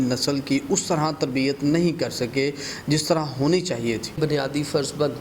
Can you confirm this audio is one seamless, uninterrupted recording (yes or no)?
no